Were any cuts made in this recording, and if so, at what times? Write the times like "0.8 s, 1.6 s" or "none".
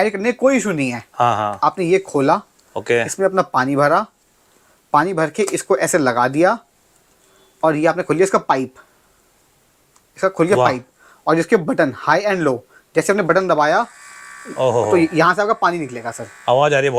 none